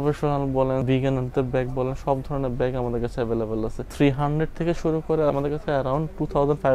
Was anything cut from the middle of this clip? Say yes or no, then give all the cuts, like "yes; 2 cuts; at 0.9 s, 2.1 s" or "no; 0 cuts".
yes; 3 cuts; at 0.8 s, 3.9 s, 5.3 s